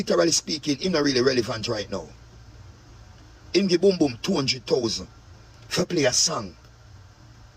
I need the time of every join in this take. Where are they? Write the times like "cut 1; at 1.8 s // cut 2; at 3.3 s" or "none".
none